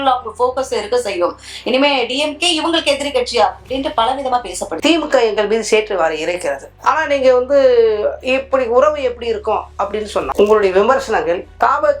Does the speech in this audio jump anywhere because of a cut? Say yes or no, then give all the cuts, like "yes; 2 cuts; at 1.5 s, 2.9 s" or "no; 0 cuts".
yes; 3 cuts; at 4.7 s, 6.7 s, 10.3 s